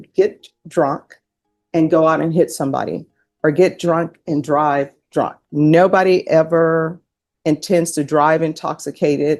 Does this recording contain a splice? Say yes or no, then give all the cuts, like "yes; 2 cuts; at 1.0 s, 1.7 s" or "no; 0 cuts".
no; 0 cuts